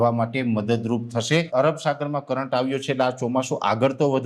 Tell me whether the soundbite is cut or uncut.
cut